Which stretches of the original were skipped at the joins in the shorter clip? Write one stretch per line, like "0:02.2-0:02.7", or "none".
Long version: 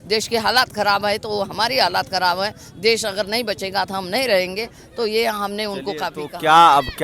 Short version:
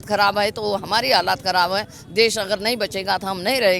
none